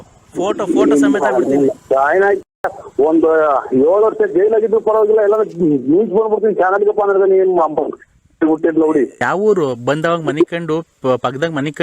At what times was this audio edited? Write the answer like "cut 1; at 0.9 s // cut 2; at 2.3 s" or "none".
cut 1; at 9.2 s